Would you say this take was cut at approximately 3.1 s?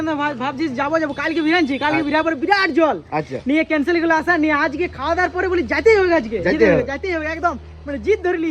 no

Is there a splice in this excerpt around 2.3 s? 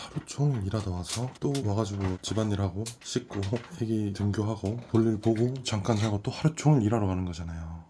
no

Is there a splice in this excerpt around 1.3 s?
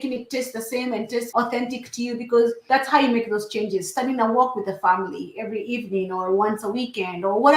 yes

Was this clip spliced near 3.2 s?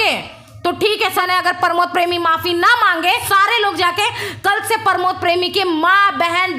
yes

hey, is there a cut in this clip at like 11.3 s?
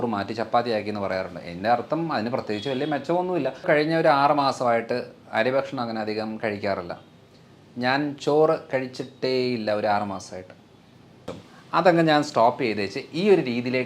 yes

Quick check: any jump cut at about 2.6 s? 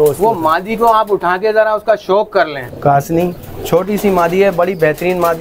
yes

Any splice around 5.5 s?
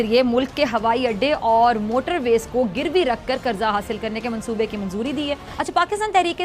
yes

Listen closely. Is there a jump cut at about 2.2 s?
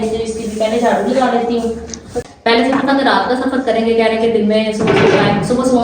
yes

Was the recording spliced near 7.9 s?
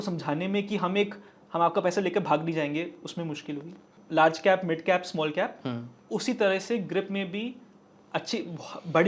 no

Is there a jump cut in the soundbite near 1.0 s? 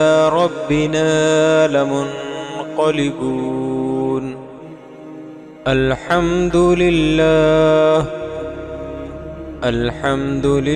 no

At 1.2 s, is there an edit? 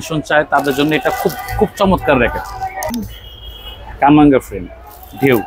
no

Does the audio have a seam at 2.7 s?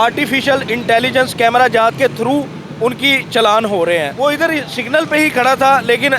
no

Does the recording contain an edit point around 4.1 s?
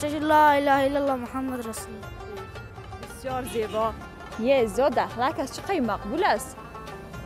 yes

